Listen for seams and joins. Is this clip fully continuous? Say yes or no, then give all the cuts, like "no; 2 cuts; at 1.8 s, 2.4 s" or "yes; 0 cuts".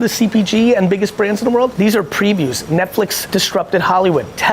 no; 2 cuts; at 1.7 s, 3.2 s